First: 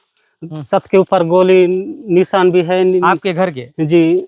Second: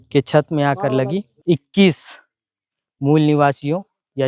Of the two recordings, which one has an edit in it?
second; 1 cut; at 1.3 s

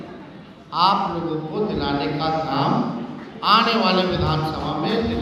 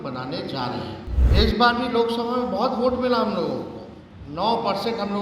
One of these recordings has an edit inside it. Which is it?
second; 1 cut; at 1.2 s

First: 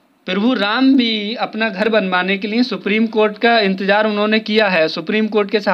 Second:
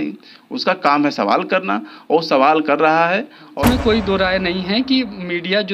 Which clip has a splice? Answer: second; 1 cut; at 3.6 s

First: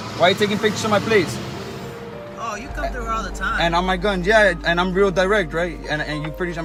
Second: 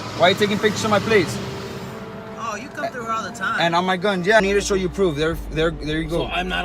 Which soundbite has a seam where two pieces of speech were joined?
second; 1 cut; at 4.4 s

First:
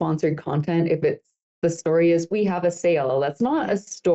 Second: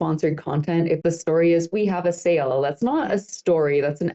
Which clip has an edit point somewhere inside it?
second; 1 cut; at 1.0 s

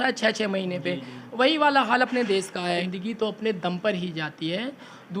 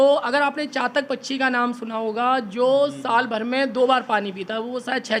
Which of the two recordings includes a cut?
first; 1 cut; at 2.9 s

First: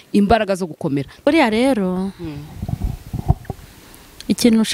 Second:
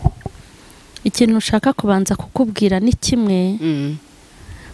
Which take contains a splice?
first; 1 cut; at 1.3 s

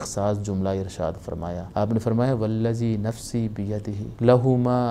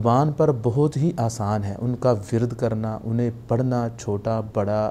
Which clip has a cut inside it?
first; 2 cuts; at 1.6 s, 4.1 s

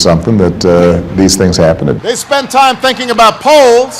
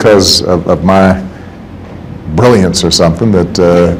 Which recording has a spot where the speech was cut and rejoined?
first; 1 cut; at 2.0 s

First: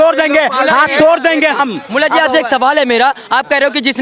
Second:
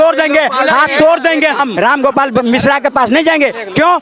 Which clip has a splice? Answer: second; 1 cut; at 1.7 s

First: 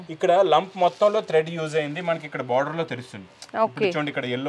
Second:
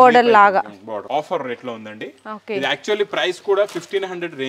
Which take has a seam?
second; 1 cut; at 1.0 s

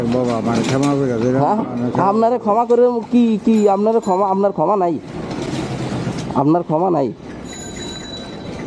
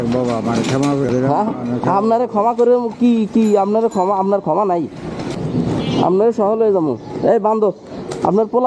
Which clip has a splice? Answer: second; 2 cuts; at 1.1 s, 5.4 s

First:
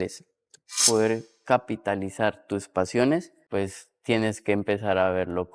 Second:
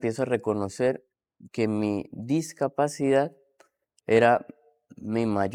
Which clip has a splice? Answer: first; 2 cuts; at 0.8 s, 3.4 s

